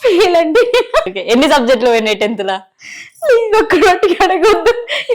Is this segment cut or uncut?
cut